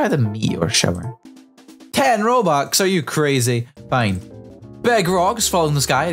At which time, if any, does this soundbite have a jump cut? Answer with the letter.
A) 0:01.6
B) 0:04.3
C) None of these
C